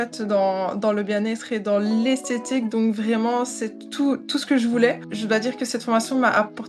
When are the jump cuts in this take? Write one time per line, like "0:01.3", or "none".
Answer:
0:05.0